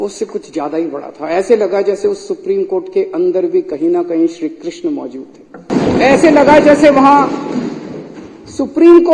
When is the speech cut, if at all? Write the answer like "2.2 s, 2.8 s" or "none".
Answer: 5.7 s